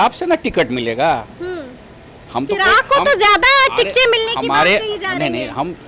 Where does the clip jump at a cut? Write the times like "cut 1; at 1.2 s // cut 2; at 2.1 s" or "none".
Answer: none